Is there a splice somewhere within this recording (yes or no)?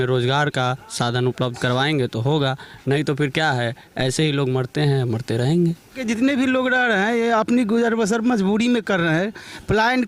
yes